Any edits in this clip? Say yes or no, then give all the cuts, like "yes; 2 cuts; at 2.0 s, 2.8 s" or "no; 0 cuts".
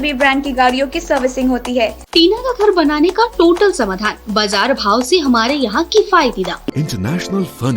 yes; 2 cuts; at 2.0 s, 6.7 s